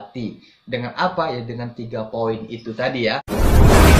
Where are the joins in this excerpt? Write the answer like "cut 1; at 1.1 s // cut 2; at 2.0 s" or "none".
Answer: cut 1; at 3.0 s